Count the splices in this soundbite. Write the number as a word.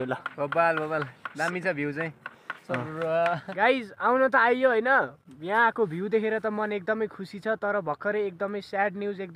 one